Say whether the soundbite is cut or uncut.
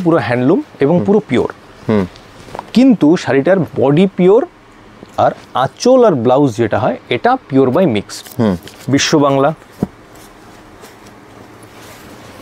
cut